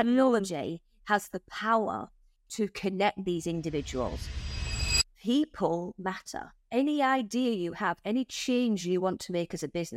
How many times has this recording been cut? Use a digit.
2